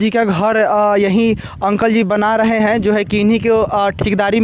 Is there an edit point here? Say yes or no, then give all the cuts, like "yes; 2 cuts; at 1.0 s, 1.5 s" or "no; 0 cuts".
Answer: no; 0 cuts